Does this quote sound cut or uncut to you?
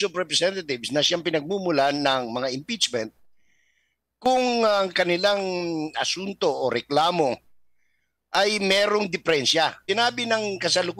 cut